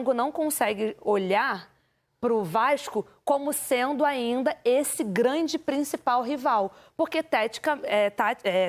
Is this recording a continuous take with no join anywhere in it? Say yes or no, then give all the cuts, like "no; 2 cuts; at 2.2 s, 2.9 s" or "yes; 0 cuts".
yes; 0 cuts